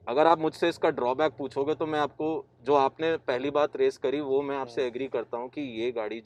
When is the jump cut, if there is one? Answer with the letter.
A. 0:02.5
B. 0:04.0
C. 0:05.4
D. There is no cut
D